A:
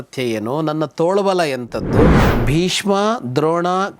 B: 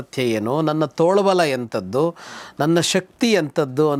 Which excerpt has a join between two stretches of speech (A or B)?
A